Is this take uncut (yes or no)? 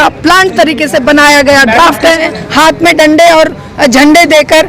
no